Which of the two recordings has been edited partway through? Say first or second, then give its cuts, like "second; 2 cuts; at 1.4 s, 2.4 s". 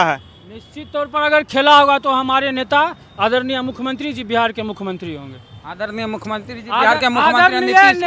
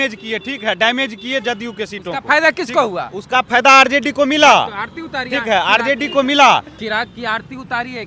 second; 1 cut; at 6.7 s